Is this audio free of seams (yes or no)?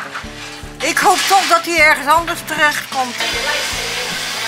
no